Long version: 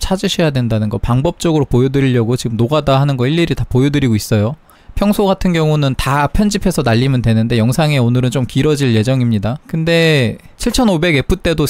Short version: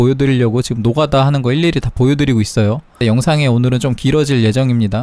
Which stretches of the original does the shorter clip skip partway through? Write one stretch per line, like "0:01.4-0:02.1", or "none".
0:04.7-0:07.5

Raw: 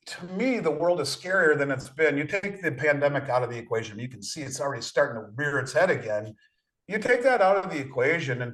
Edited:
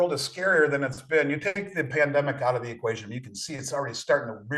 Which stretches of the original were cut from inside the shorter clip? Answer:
none

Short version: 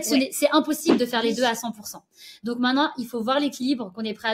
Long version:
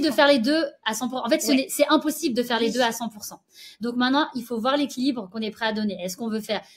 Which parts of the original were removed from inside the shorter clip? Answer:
none

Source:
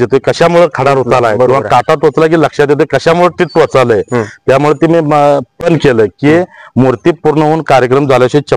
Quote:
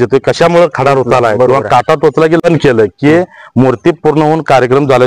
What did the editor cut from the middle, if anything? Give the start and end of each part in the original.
0:02.4-0:05.6

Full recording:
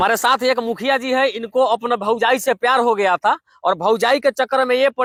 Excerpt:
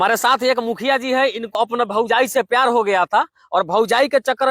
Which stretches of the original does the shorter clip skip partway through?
0:01.6-0:01.7

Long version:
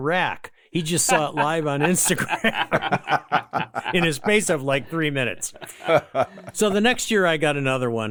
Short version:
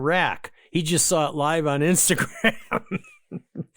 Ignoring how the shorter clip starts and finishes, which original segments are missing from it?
none

